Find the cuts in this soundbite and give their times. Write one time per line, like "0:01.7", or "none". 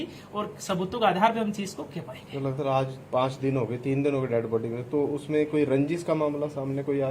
0:04.5